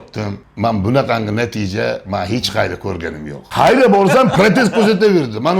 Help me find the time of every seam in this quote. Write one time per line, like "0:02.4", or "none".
0:03.4